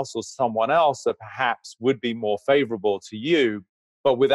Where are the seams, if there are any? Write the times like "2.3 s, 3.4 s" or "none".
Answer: none